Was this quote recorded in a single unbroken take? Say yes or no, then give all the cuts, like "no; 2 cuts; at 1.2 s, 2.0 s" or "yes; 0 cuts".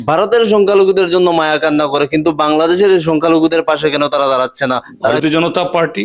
no; 1 cut; at 5.1 s